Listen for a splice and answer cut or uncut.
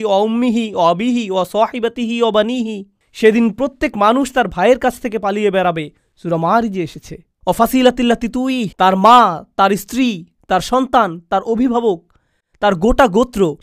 uncut